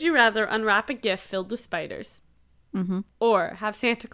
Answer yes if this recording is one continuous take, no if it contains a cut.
yes